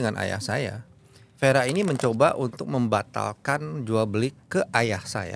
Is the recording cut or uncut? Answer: uncut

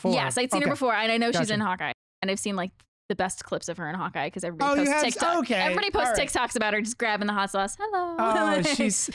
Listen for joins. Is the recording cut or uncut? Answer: cut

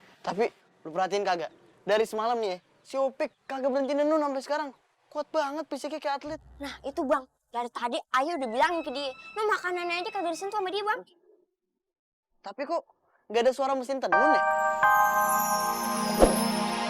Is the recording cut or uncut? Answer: cut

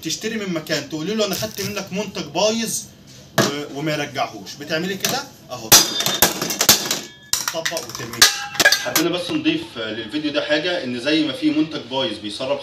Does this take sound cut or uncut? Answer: cut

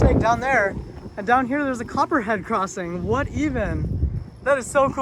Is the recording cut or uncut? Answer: uncut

